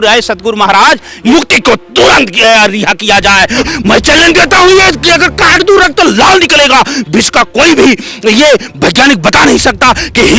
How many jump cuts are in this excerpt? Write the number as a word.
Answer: two